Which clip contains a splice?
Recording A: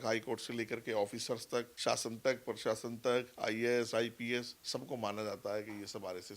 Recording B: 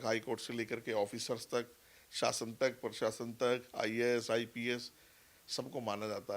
A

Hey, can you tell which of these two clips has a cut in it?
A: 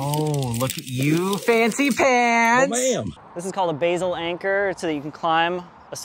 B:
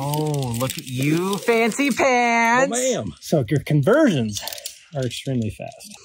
A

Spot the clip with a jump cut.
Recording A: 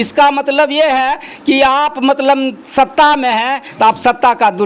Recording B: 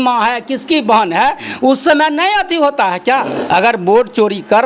B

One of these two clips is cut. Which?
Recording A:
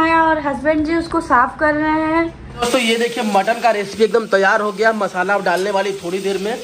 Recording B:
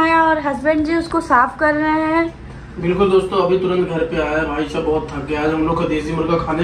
A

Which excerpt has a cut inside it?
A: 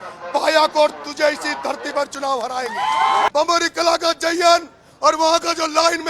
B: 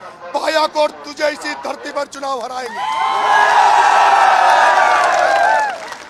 A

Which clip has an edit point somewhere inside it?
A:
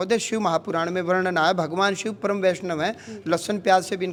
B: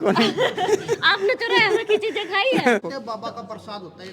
B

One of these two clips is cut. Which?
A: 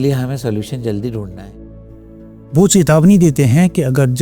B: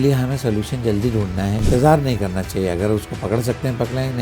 B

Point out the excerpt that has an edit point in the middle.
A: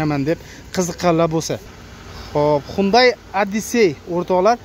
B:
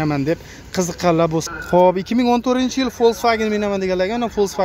B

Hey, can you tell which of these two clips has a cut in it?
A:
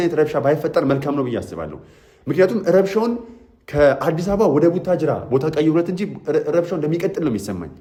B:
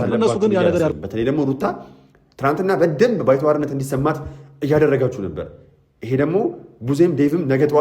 B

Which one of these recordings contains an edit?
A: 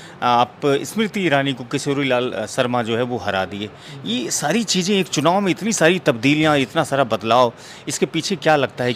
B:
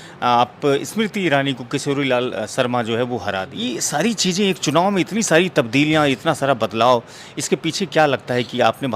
B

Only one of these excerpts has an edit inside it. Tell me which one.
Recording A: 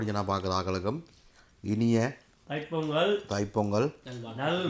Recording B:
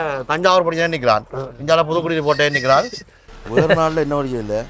B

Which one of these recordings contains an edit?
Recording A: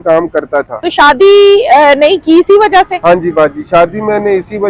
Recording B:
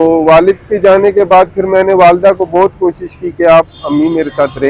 A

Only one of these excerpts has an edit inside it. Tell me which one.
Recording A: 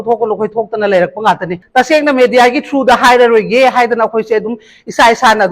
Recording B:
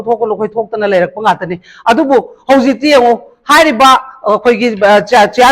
A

